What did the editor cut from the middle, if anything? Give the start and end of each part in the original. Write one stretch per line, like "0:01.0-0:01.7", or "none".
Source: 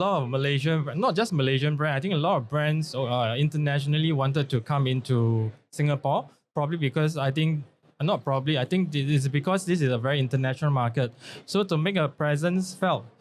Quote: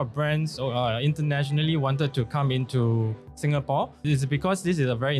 0:06.3-0:09.0